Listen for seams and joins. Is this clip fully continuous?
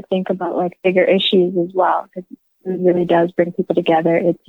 no; 1 cut; at 2.5 s

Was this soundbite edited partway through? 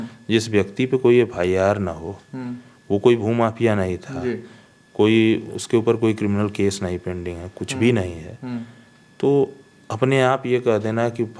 no; 0 cuts

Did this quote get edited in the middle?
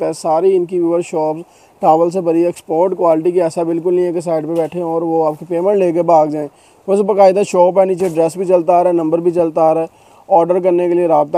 no; 0 cuts

